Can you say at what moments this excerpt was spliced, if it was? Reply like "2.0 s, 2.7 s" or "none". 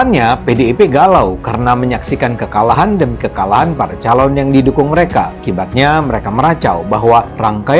none